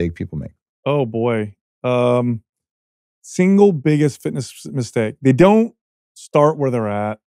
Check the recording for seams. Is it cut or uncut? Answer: uncut